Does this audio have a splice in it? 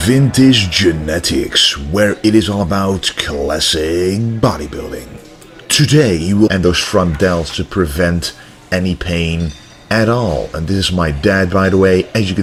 no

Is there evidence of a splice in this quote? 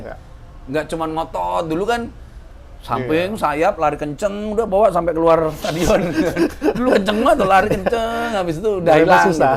no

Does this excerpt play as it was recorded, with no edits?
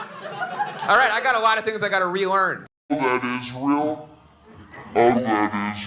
yes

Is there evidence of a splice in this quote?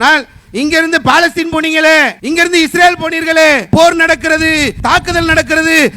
yes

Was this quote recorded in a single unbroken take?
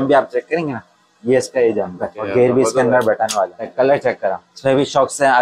no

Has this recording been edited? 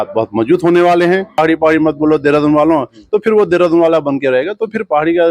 yes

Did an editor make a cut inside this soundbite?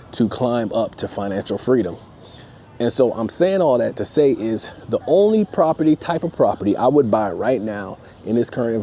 no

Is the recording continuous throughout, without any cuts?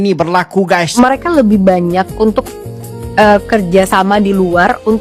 no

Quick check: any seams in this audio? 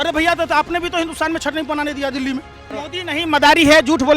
yes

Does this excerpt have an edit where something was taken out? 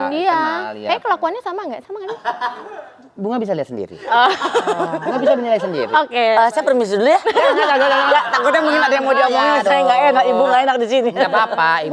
no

